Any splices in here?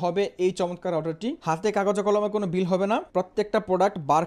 yes; 2 cuts; at 1.4 s, 3.1 s

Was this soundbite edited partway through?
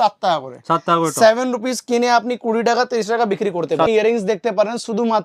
yes; 1 cut; at 3.9 s

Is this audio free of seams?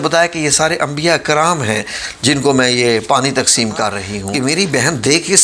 no; 1 cut; at 4.3 s

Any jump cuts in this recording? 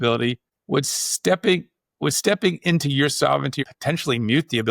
yes; 1 cut; at 3.6 s

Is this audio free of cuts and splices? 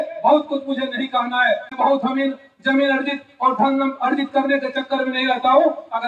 no; 1 cut; at 1.7 s

